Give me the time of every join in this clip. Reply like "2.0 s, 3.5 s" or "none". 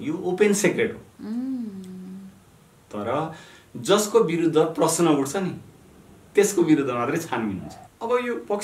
7.7 s